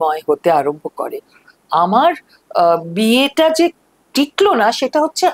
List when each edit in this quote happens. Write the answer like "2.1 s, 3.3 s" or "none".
1.5 s

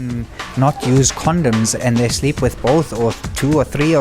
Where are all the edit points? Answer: 1.7 s

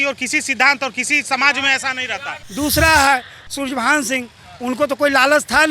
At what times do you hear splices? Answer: 2.4 s

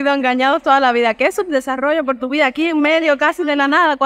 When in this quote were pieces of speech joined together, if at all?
none

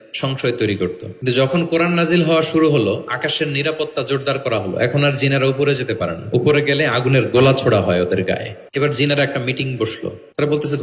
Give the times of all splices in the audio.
1.1 s, 8.6 s, 10.0 s

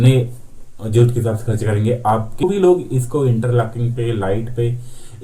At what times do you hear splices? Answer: 2.4 s

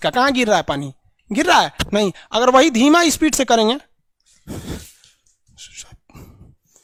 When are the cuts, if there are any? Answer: none

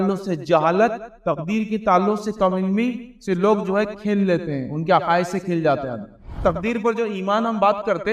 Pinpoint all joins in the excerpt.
6.4 s

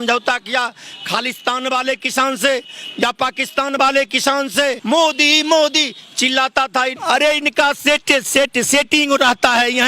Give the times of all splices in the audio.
4.8 s, 7.0 s

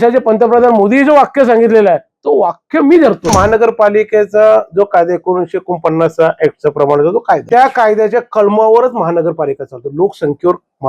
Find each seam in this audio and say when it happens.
3.3 s, 7.4 s

